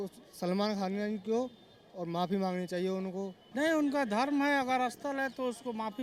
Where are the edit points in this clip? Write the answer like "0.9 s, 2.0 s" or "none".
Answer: none